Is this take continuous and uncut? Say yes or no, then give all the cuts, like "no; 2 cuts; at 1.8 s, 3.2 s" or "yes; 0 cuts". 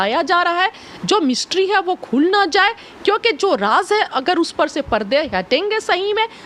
yes; 0 cuts